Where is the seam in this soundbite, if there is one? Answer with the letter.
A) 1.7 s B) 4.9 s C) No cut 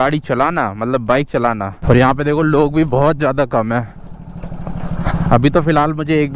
A